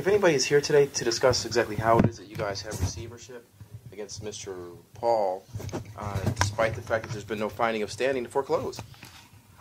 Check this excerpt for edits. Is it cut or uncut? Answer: uncut